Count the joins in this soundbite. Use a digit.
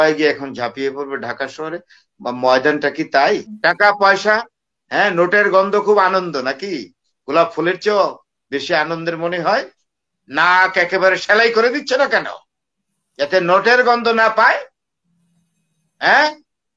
1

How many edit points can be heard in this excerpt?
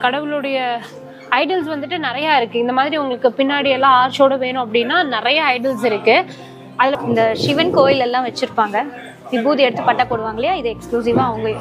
1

